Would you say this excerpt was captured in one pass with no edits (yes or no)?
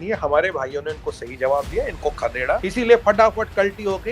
no